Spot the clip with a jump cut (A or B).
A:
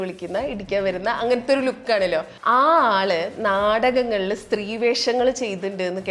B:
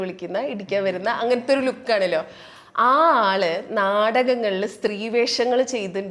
A